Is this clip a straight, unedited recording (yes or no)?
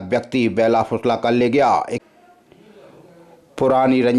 no